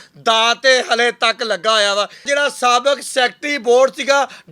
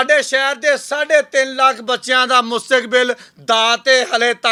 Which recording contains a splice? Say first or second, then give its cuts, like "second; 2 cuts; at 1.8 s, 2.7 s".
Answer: first; 1 cut; at 2.2 s